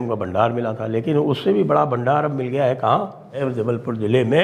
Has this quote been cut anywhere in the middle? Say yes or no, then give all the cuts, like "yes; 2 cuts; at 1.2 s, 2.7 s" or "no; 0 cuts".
yes; 1 cut; at 3.4 s